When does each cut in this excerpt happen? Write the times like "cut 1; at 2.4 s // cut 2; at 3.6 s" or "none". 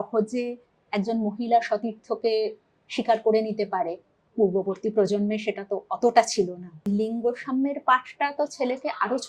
cut 1; at 6.9 s